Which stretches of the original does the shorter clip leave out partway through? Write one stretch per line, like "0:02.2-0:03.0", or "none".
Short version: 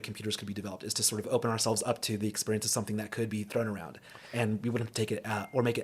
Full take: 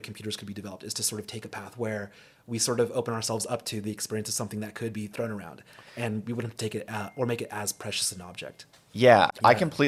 0:01.3-0:02.9